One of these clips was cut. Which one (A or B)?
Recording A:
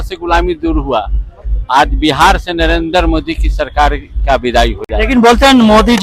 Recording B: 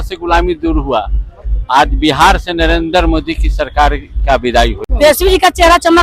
B